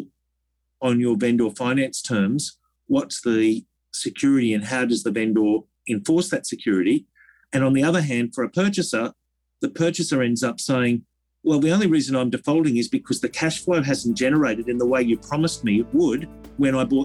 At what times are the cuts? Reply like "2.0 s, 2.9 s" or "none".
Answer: none